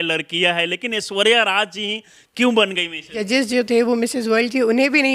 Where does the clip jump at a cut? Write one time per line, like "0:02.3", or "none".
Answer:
0:03.2

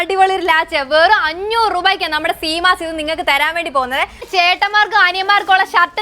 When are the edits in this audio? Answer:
0:04.2

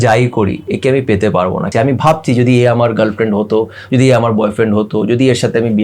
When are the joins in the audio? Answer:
0:01.7

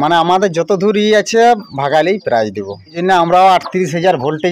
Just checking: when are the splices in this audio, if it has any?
0:02.9

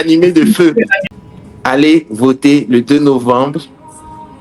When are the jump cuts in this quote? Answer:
0:01.0

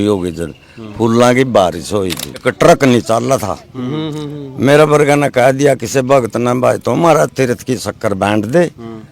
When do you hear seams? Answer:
0:02.5

